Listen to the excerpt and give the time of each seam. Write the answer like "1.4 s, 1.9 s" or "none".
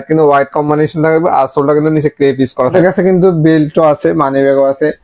2.7 s